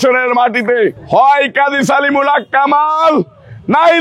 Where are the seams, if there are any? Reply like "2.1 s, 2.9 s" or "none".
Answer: 1.0 s